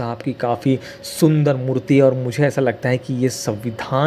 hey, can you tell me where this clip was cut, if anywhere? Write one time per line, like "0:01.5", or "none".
none

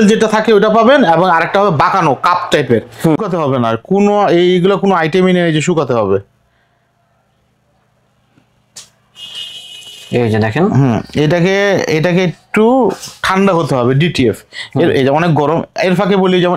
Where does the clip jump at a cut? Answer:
0:03.2

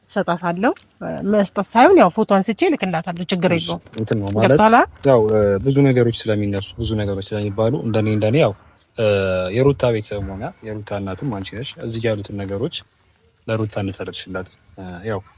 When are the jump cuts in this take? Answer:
none

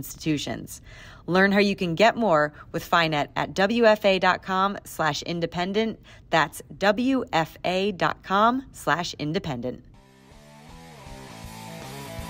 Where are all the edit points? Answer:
0:10.3

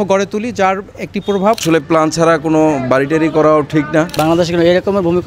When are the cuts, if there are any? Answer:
0:01.6
0:04.1

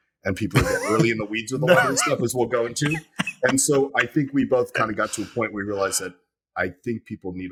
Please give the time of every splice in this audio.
none

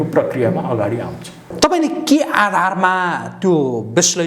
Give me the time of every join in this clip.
0:01.5

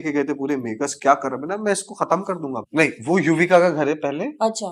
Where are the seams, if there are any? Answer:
0:02.6

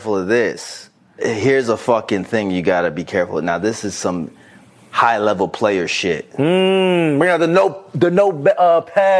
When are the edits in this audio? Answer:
none

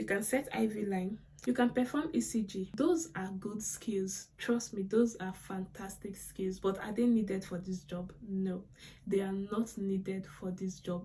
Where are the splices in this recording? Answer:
0:01.3

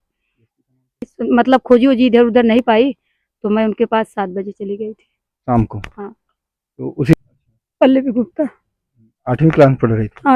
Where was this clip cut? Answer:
0:01.1
0:07.2

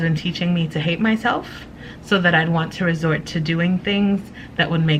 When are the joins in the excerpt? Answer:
none

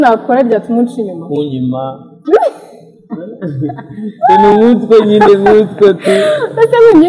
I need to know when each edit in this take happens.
none

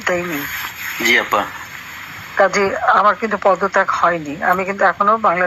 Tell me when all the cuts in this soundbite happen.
none

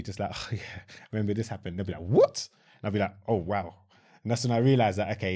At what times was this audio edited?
none

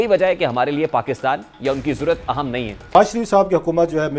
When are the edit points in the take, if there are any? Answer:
none

